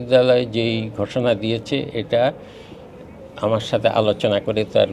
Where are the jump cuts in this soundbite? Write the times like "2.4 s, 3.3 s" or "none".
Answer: none

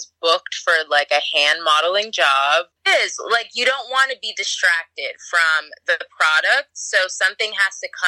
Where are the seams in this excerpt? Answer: 2.8 s

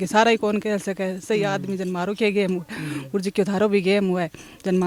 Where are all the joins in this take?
none

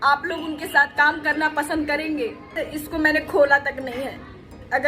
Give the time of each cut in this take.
2.5 s

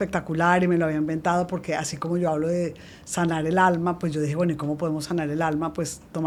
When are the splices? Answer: none

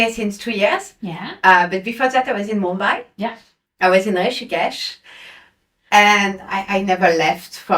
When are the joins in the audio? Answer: 3.5 s

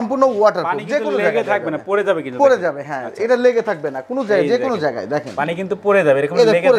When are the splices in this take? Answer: none

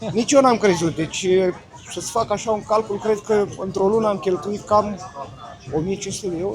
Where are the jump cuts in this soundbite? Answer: none

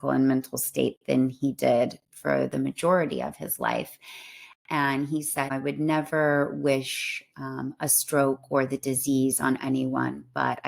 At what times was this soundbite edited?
5.5 s

